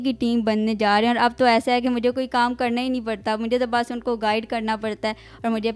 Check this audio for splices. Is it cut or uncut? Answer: uncut